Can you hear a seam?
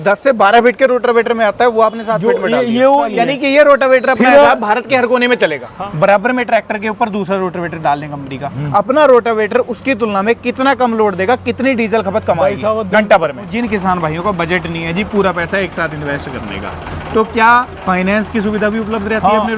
yes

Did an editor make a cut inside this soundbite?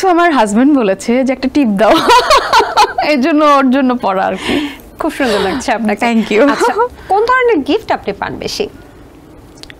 no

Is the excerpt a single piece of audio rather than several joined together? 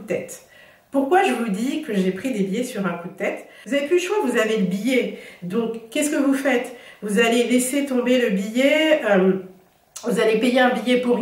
no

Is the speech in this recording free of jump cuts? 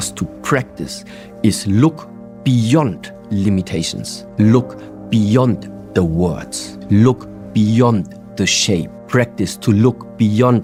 yes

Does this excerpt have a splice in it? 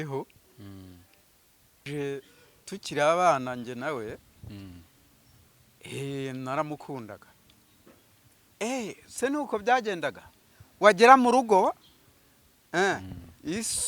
yes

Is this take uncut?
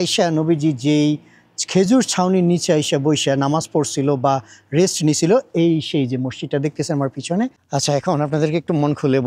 no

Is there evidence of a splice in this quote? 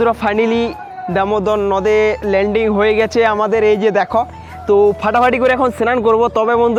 no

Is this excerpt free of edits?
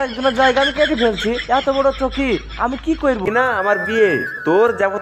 no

